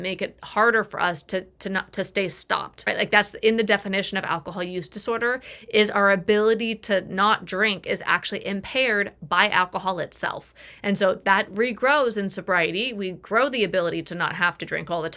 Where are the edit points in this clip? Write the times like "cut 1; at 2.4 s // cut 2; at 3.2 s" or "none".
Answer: none

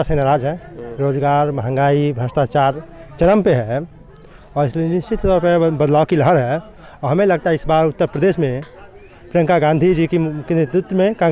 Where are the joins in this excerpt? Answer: none

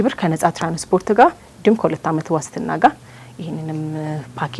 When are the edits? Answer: none

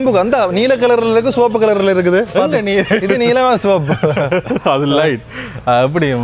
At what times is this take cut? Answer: none

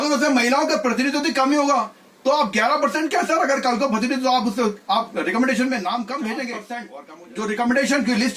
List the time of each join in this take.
cut 1; at 6.9 s

